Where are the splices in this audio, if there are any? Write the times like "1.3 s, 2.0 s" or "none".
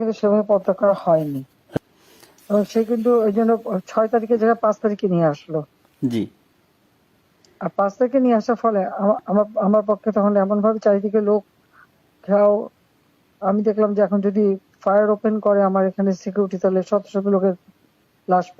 1.8 s